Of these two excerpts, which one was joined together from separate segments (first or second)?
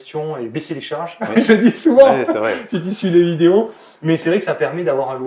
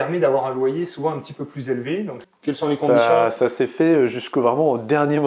second